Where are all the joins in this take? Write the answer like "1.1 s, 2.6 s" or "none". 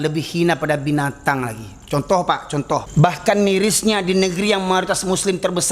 2.9 s